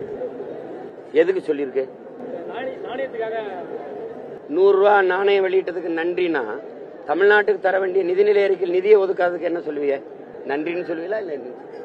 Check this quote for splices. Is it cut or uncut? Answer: cut